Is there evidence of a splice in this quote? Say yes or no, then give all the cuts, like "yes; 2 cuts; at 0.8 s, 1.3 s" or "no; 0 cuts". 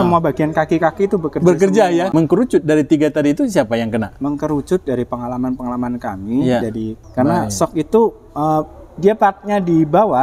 yes; 2 cuts; at 2.1 s, 7.0 s